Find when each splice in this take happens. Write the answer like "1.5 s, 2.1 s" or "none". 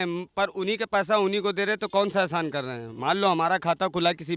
none